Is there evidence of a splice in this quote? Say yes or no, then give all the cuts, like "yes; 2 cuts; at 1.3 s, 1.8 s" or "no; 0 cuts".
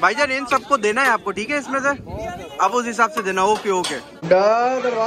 yes; 1 cut; at 4.2 s